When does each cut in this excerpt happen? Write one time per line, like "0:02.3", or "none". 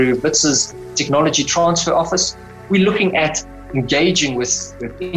none